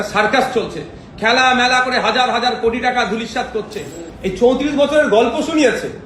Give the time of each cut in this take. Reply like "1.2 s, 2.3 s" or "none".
4.0 s